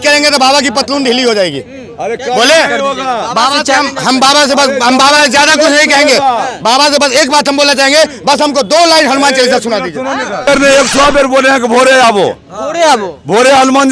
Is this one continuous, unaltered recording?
no; 1 cut; at 10.4 s

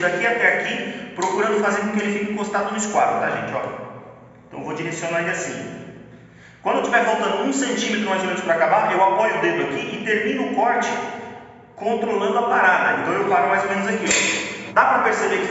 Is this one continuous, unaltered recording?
no; 1 cut; at 14.5 s

